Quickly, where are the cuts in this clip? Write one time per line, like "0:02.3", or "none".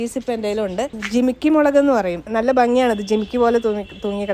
0:00.9
0:02.2